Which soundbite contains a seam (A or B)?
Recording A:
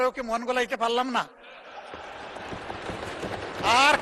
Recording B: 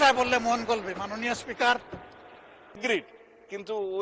B